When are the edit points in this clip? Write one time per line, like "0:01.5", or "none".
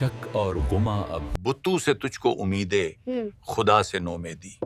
0:01.3